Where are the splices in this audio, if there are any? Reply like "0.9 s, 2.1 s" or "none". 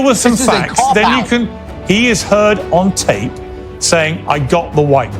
1.6 s